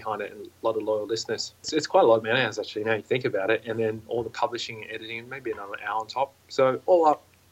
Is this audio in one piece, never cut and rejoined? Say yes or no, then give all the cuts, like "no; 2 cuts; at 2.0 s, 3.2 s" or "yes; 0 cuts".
no; 1 cut; at 1.7 s